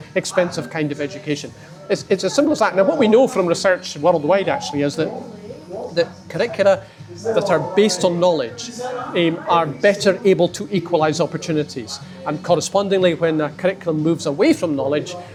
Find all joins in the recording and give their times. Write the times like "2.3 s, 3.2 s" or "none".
none